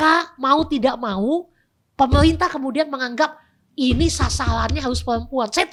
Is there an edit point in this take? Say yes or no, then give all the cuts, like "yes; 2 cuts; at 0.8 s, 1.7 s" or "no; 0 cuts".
no; 0 cuts